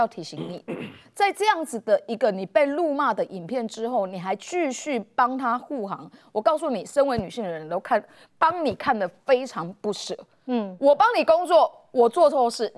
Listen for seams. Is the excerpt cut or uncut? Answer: uncut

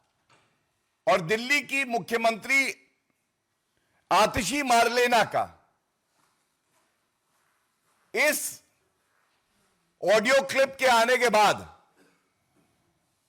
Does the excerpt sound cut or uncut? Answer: uncut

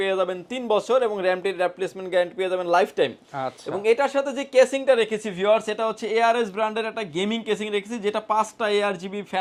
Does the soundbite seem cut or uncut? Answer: uncut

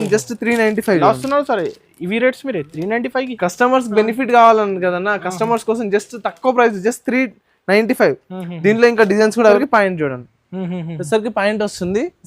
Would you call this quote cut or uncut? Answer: cut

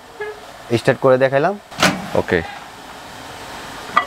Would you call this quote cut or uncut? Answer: cut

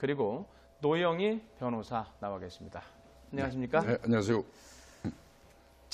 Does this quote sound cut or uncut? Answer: uncut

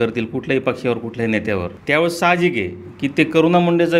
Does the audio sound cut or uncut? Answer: cut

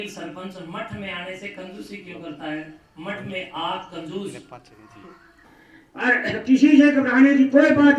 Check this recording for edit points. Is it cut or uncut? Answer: cut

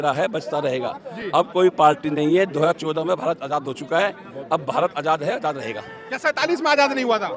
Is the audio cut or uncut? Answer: uncut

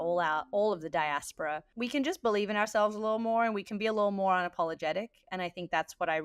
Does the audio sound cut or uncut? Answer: cut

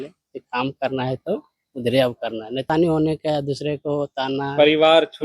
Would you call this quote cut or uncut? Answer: cut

